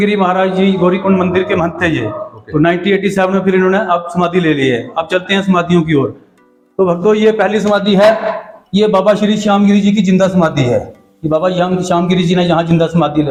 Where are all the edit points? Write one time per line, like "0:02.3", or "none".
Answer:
none